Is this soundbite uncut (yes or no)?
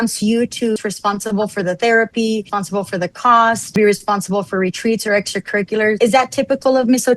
no